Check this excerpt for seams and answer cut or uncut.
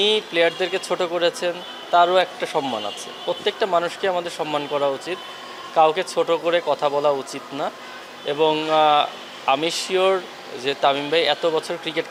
uncut